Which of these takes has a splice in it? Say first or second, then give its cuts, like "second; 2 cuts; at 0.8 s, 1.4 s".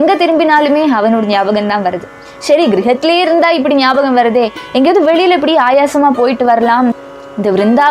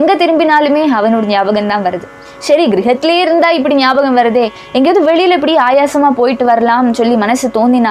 first; 1 cut; at 6.9 s